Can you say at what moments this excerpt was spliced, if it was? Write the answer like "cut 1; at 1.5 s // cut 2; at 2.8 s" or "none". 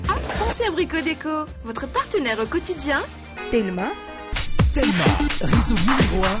cut 1; at 3.2 s